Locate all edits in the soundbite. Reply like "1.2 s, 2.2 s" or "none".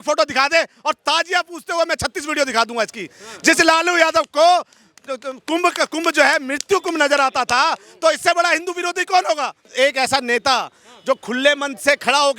9.6 s